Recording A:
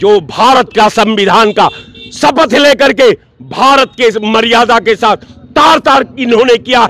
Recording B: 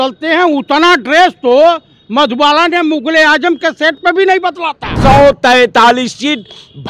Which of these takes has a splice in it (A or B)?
B